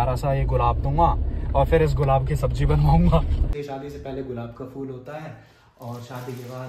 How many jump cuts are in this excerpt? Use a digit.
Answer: 1